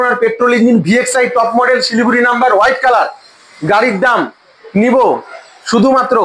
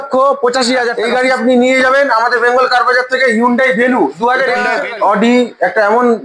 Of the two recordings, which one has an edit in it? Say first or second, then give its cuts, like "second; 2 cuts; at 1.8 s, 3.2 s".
second; 2 cuts; at 1.0 s, 4.7 s